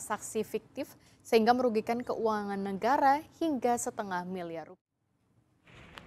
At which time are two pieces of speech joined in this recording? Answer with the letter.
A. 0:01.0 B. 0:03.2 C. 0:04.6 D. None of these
C